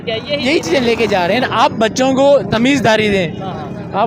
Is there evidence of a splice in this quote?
no; 0 cuts

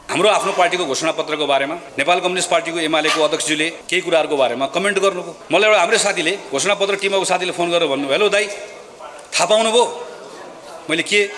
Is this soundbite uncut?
no; 3 cuts; at 1.8 s, 3.8 s, 5.3 s

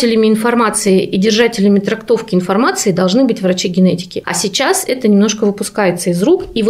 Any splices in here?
no; 0 cuts

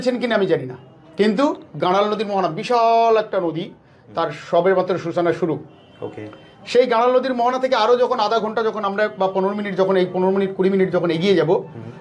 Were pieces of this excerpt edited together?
no; 0 cuts

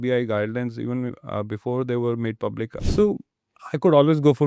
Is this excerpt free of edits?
no; 1 cut; at 2.8 s

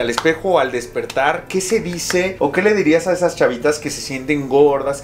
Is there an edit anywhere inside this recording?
no; 0 cuts

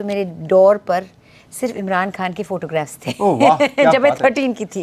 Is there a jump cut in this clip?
no; 0 cuts

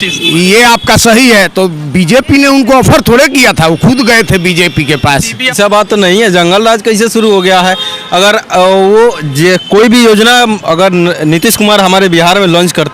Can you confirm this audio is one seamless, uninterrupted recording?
no; 1 cut; at 5.5 s

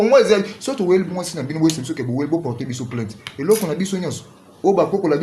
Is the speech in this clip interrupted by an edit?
no; 0 cuts

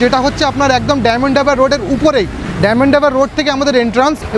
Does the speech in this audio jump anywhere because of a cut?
no; 0 cuts

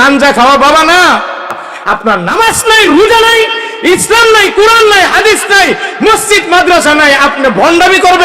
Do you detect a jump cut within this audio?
yes; 1 cut; at 1.7 s

